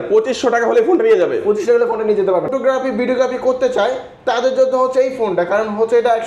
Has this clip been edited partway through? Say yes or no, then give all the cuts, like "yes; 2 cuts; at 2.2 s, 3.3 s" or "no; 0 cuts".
yes; 1 cut; at 2.5 s